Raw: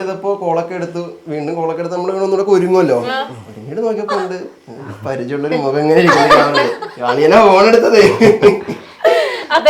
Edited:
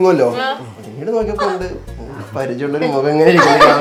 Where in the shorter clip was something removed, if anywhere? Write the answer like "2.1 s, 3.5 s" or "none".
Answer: none